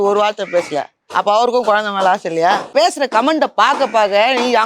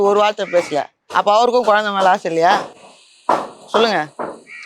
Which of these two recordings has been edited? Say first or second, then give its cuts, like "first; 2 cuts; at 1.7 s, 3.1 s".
first; 1 cut; at 2.7 s